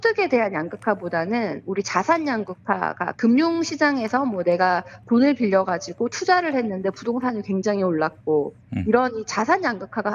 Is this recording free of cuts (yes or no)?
yes